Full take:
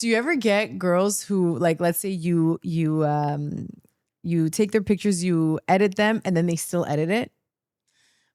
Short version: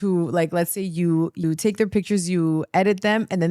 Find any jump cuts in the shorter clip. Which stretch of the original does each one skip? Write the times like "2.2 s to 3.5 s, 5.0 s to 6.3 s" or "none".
2.7 s to 4.4 s